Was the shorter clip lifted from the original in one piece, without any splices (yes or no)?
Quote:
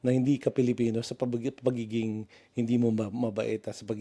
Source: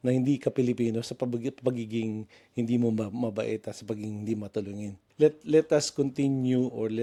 yes